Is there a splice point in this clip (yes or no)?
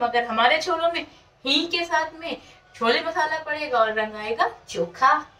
no